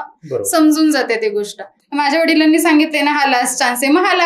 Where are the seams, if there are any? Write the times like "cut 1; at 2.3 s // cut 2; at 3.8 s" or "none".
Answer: cut 1; at 1.8 s